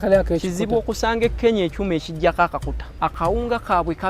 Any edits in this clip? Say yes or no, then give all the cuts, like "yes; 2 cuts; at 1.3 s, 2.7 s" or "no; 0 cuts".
yes; 1 cut; at 2.8 s